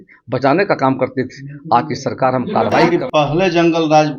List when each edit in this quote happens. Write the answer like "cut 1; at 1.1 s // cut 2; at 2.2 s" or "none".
cut 1; at 2.9 s